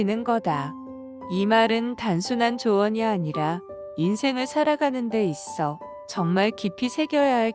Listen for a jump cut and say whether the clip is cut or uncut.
cut